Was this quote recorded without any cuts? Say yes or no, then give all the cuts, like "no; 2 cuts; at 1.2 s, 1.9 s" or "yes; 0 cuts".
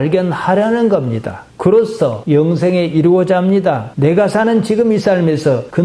no; 1 cut; at 3.9 s